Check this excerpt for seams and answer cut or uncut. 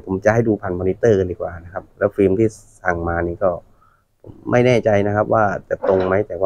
uncut